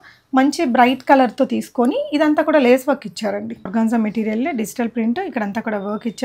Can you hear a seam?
yes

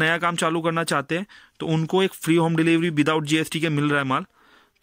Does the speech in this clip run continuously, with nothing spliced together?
yes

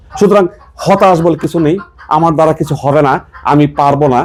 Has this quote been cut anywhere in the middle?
no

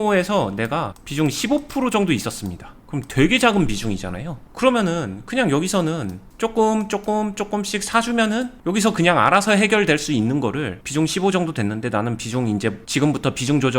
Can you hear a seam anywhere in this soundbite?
yes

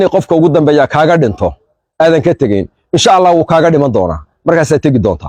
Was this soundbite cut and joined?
no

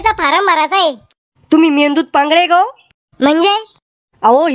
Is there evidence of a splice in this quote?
no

